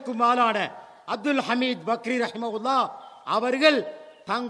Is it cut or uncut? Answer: uncut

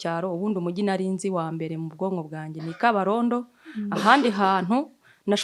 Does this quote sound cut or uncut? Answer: uncut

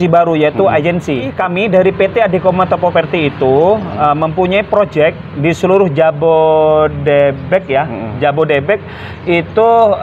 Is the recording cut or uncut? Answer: cut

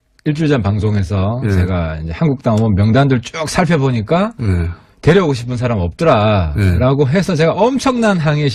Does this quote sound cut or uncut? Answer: cut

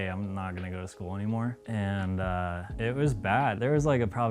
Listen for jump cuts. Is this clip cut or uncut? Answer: cut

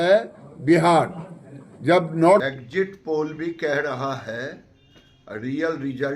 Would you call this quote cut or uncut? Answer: cut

